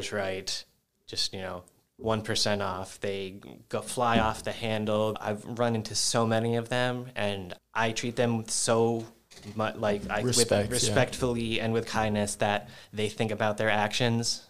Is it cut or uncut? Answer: cut